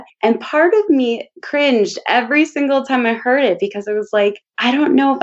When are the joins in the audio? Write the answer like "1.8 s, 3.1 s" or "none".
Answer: none